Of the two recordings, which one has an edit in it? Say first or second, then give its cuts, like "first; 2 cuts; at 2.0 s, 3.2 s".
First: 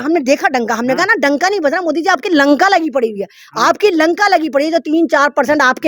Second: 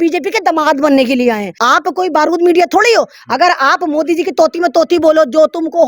second; 1 cut; at 1.5 s